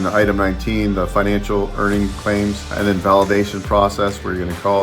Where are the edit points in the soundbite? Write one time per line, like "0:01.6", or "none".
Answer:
0:02.7